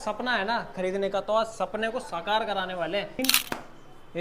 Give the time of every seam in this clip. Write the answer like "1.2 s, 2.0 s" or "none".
3.2 s